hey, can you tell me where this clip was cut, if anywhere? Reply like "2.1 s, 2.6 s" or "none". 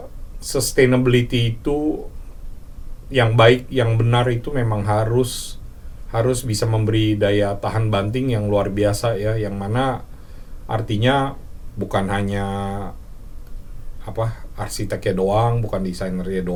none